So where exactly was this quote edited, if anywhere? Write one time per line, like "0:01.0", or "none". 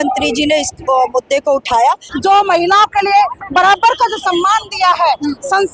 0:02.1